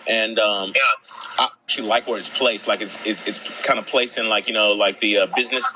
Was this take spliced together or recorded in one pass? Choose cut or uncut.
cut